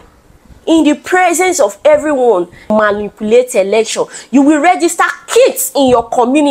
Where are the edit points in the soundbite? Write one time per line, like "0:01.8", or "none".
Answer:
0:02.7